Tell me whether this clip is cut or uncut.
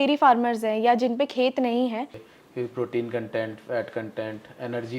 cut